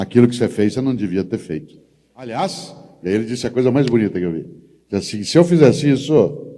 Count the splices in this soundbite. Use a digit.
1